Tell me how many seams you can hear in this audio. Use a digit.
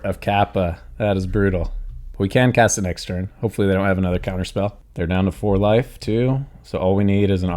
1